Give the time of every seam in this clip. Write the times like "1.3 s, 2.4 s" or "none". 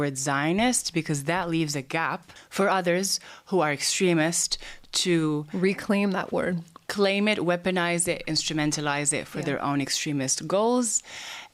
2.3 s